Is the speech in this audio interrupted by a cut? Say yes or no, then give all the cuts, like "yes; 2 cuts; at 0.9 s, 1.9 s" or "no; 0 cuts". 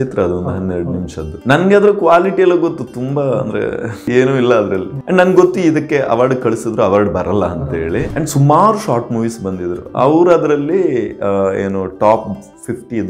yes; 4 cuts; at 1.3 s, 4.0 s, 4.9 s, 8.1 s